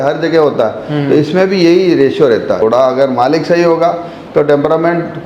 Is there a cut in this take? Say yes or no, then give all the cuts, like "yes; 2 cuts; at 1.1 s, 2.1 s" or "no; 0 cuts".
yes; 1 cut; at 2.6 s